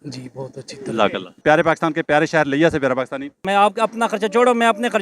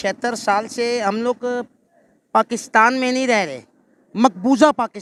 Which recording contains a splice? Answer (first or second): first